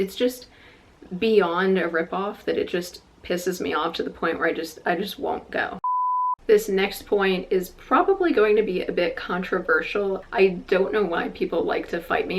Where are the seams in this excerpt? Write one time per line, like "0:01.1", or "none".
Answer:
0:05.9
0:10.2